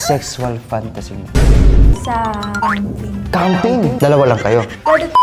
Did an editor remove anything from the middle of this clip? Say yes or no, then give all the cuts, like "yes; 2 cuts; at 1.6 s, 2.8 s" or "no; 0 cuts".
yes; 1 cut; at 1.2 s